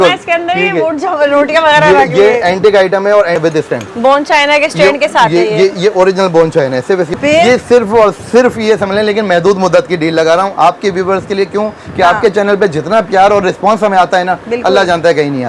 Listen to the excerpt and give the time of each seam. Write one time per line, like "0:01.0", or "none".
0:03.4
0:07.1